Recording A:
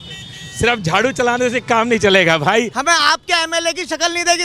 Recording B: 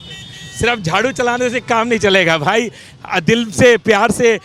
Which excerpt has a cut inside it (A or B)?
A